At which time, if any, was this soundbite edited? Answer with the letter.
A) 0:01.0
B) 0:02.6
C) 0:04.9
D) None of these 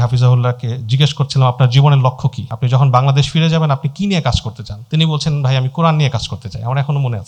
D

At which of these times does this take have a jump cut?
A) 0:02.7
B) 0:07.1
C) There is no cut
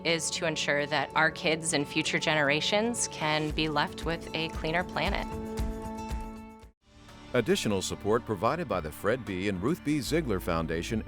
B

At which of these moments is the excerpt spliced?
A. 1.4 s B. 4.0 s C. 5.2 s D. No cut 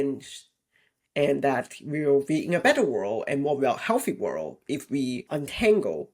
C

